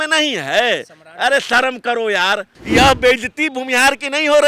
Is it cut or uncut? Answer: cut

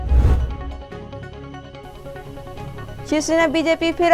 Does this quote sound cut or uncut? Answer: uncut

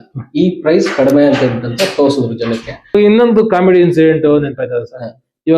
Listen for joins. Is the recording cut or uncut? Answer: cut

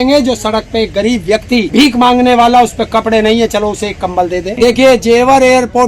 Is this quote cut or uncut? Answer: cut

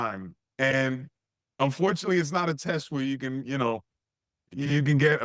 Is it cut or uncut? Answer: uncut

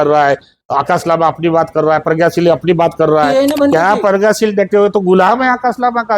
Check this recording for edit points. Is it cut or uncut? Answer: cut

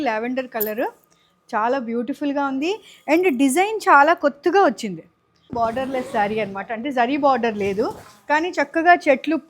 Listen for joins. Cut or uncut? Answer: cut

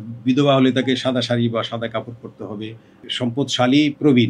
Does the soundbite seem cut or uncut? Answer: cut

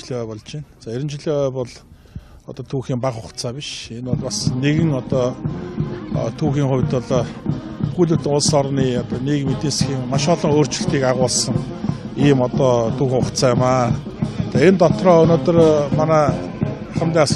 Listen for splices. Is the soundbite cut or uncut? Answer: uncut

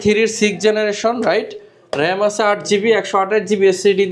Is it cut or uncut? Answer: uncut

